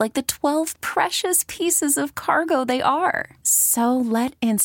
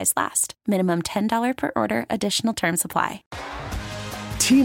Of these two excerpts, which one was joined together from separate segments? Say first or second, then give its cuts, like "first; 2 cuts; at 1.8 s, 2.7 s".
second; 1 cut; at 3.4 s